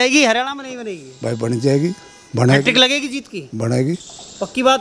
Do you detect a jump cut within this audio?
no; 0 cuts

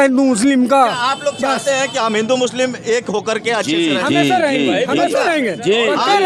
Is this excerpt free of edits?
yes; 0 cuts

